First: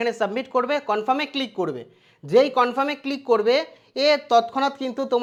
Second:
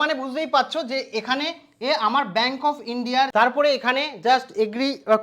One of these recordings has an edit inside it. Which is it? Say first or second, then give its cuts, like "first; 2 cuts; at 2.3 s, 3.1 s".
second; 1 cut; at 3.3 s